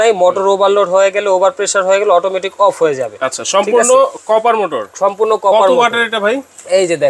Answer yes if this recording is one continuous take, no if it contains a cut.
yes